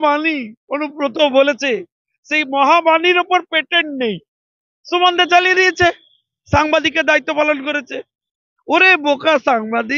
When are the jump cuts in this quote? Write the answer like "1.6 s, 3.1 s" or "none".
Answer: none